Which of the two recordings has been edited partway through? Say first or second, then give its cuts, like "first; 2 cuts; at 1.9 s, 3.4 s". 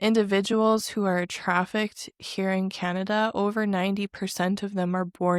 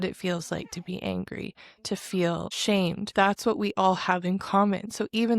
second; 1 cut; at 2.8 s